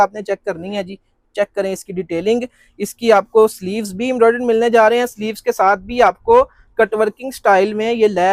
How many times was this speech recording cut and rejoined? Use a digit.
0